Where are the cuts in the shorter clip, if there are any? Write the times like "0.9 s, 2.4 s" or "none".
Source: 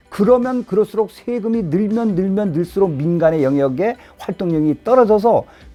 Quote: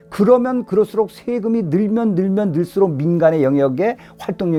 none